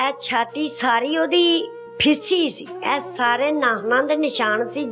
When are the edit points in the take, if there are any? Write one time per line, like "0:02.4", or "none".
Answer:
0:01.8
0:02.7